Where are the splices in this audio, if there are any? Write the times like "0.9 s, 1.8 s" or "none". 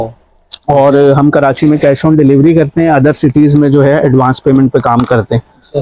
none